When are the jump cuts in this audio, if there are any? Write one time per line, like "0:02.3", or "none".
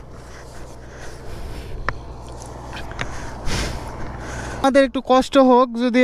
0:04.6